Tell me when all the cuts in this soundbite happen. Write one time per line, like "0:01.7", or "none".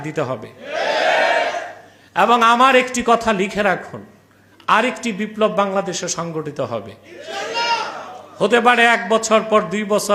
none